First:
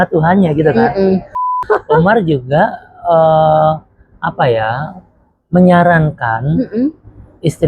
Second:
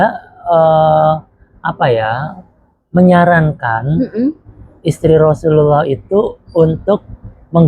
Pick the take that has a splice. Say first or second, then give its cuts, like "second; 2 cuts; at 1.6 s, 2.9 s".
first; 1 cut; at 1.6 s